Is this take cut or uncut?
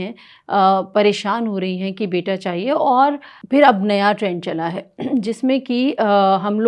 cut